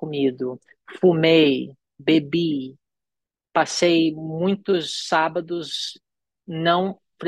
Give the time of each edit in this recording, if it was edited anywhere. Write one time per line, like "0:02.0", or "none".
none